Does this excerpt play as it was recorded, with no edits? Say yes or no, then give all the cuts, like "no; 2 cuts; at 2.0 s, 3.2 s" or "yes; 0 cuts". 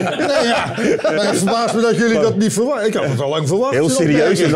yes; 0 cuts